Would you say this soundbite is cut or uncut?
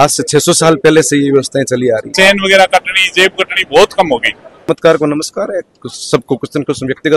cut